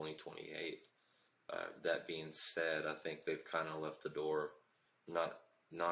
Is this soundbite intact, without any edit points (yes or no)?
yes